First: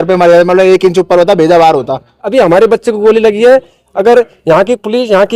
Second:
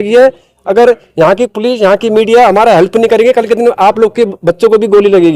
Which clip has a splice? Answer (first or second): first